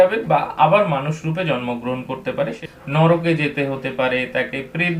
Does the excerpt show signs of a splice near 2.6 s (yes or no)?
yes